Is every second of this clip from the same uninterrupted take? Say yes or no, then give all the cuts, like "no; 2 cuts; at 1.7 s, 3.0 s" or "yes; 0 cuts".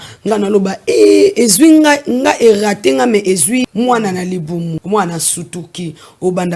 no; 2 cuts; at 3.6 s, 4.8 s